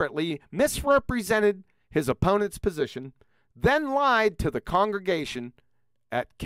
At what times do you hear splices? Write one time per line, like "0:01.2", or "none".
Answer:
none